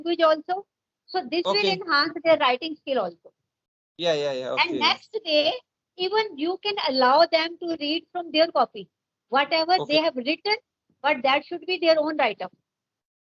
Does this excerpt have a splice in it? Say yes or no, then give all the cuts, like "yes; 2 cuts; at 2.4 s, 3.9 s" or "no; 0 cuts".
no; 0 cuts